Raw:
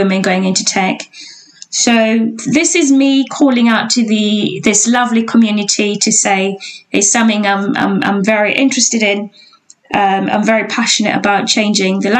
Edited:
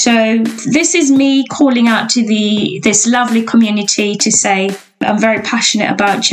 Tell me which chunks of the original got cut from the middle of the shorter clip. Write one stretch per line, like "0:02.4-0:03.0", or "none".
0:06.8-0:10.3